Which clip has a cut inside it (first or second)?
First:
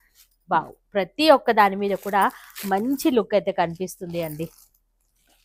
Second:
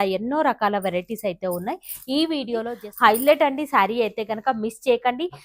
second